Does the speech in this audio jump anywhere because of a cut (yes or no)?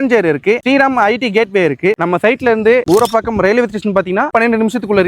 yes